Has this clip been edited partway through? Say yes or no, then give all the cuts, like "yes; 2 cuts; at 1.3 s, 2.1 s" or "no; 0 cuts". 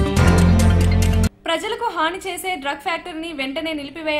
yes; 1 cut; at 1.2 s